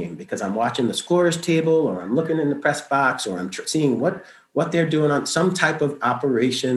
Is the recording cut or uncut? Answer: uncut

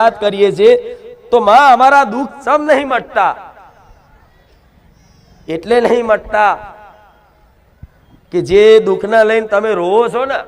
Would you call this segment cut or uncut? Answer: uncut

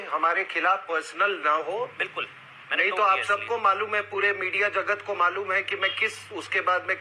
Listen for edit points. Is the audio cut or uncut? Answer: uncut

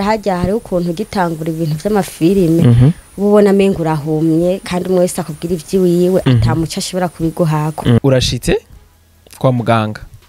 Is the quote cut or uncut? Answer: cut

